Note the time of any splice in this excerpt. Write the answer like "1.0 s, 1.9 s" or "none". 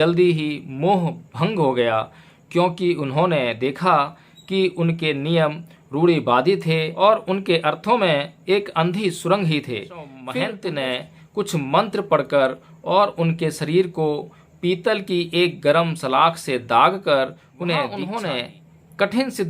6.9 s, 10.2 s, 18.0 s